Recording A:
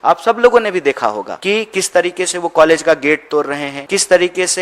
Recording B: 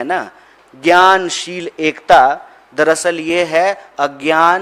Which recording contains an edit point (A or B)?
A